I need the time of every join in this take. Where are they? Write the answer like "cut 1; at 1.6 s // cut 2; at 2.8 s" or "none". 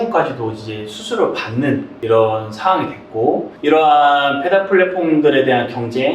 cut 1; at 1.9 s // cut 2; at 3.5 s